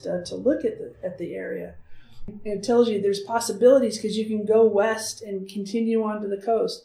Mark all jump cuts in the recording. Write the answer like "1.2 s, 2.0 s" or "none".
2.3 s